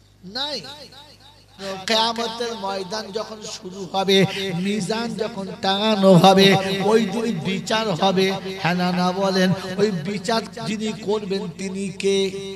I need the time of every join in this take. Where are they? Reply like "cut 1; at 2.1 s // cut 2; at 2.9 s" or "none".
cut 1; at 1.6 s

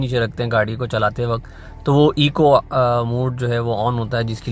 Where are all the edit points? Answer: none

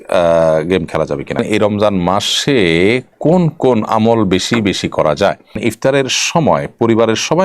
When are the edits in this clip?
cut 1; at 1.4 s // cut 2; at 5.6 s

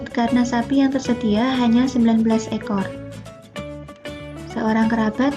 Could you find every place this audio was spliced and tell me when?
cut 1; at 2.8 s // cut 2; at 4.5 s

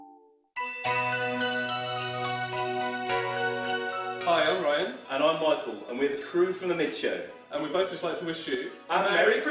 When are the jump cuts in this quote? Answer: cut 1; at 4.2 s

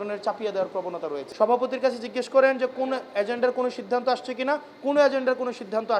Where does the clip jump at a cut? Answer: cut 1; at 1.2 s

